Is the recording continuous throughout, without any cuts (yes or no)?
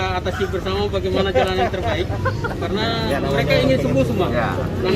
yes